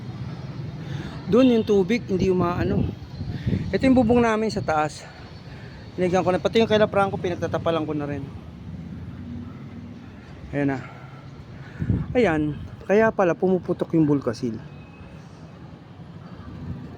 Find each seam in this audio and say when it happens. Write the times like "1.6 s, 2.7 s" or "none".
none